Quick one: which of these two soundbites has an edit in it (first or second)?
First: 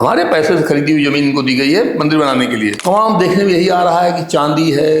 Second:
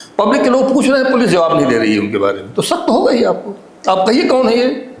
first